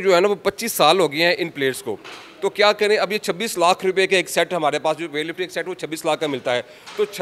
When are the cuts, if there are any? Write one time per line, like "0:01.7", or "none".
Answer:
none